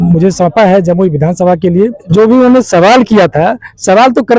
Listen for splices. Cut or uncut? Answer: cut